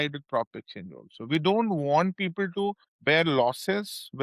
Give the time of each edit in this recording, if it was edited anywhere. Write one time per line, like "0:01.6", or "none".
0:02.9